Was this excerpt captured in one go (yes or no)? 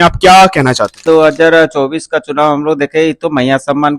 no